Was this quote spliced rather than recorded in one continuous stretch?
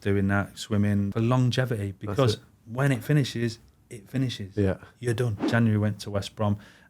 yes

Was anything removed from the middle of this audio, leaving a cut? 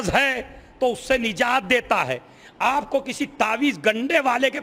no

